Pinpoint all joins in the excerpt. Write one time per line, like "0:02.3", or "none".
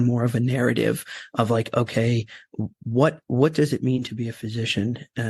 0:03.2